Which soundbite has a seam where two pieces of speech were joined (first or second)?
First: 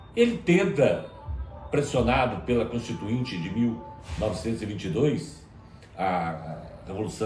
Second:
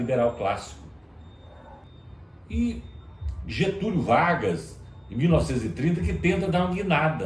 second